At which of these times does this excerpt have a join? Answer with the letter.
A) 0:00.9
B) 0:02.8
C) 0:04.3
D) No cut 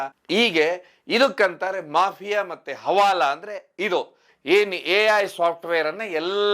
C